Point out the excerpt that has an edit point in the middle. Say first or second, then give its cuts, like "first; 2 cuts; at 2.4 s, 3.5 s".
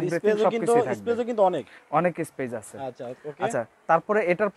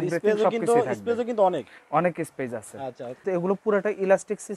second; 1 cut; at 3.2 s